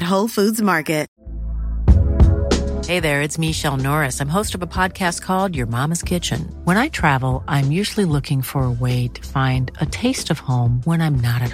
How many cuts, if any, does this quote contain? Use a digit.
1